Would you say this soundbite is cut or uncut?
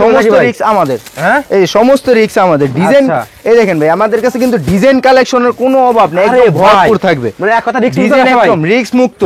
uncut